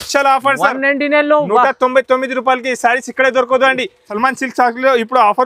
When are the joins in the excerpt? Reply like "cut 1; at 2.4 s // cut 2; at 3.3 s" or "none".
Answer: none